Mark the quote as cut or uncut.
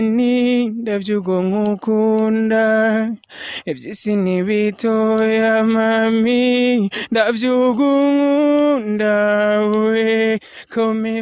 uncut